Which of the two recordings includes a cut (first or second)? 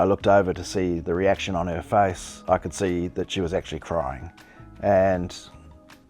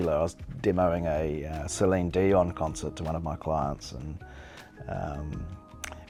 first